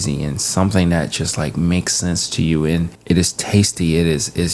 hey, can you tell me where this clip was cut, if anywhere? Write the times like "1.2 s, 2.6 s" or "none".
2.9 s